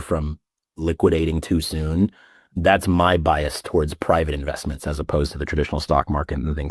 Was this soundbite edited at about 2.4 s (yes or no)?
yes